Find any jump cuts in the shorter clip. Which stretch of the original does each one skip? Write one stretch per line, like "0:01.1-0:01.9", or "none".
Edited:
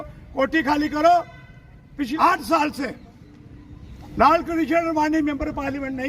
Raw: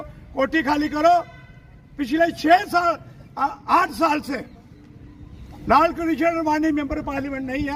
0:02.1-0:03.6